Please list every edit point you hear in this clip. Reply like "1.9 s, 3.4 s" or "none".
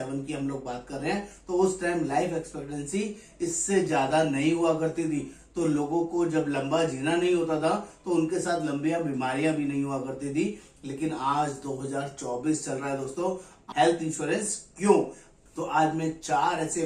13.6 s